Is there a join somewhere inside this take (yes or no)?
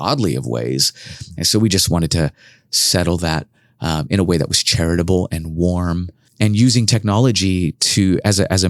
yes